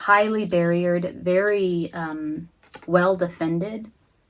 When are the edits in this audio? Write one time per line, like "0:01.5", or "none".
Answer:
none